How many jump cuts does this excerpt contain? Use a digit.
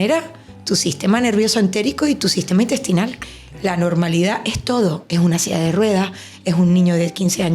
1